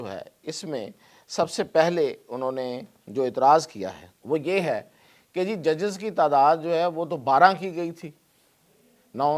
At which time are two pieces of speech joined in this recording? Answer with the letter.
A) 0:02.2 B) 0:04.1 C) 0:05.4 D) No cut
B